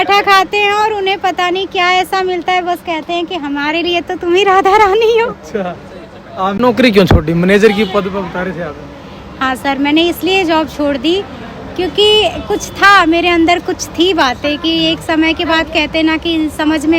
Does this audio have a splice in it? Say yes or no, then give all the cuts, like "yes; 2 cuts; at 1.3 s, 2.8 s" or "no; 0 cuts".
yes; 1 cut; at 6.6 s